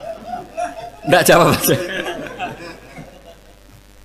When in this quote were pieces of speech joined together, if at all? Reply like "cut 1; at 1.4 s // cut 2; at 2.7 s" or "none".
none